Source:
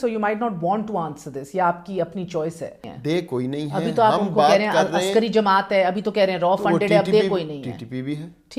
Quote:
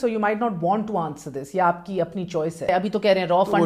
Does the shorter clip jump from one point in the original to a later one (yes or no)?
yes